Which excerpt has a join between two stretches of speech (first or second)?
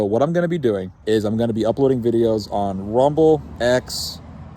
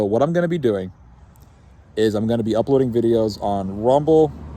first